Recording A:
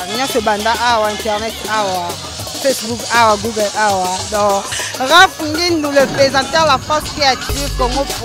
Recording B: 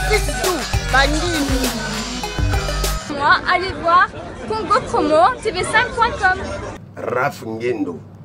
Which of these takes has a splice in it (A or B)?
B